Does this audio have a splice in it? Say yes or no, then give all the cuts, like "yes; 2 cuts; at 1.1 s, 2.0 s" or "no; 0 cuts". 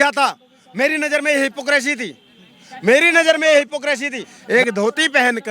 yes; 1 cut; at 4.3 s